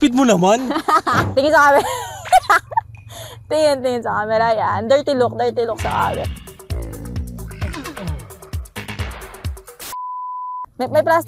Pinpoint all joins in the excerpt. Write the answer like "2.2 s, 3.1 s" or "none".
1.2 s

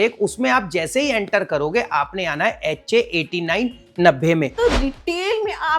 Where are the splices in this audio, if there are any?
4.5 s

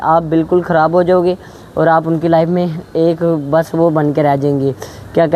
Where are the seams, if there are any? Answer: none

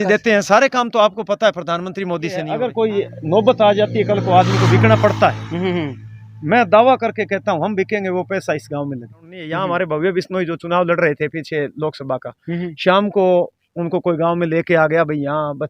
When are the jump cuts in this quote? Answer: 2.6 s, 9.5 s

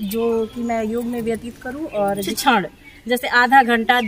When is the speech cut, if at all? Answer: 2.3 s

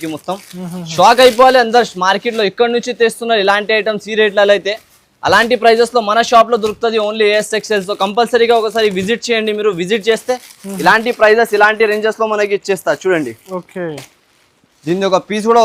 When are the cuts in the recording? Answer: none

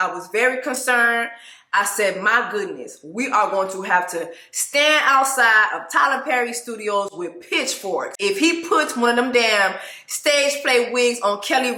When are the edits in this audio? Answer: none

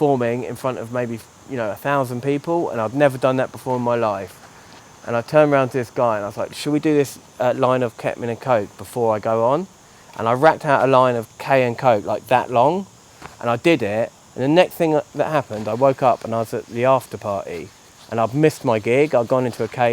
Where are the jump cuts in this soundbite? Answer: none

